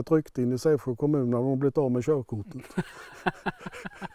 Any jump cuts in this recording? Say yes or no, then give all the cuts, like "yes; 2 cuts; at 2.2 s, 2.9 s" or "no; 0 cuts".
no; 0 cuts